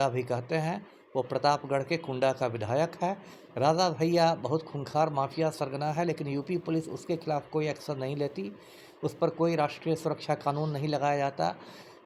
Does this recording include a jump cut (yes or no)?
no